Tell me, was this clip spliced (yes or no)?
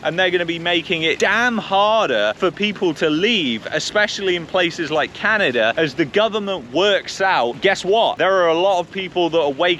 yes